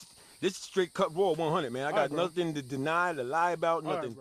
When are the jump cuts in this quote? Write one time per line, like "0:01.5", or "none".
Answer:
none